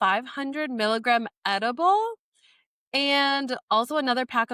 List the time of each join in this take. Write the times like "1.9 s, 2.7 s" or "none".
none